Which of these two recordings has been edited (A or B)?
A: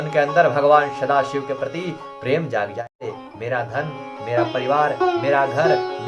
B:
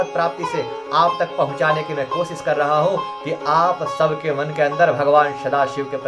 A